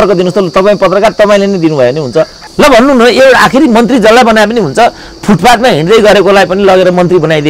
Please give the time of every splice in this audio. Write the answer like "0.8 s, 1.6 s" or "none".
2.4 s